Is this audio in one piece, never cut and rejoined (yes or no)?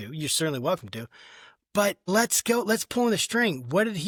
yes